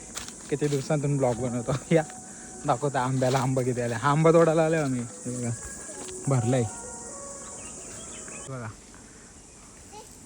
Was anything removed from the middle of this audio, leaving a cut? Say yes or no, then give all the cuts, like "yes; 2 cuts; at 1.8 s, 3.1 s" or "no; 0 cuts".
yes; 1 cut; at 8.5 s